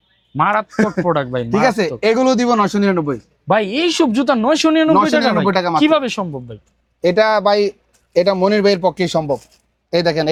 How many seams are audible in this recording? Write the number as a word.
zero